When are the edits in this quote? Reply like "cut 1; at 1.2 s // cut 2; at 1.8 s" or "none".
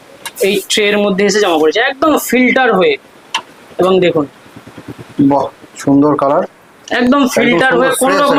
none